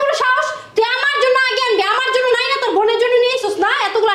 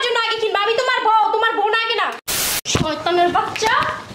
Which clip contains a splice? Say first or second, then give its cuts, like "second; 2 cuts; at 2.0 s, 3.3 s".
second; 1 cut; at 2.2 s